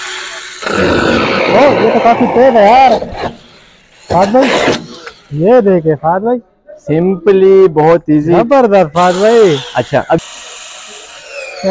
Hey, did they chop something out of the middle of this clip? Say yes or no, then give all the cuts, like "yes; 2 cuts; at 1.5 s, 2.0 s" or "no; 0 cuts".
yes; 1 cut; at 10.2 s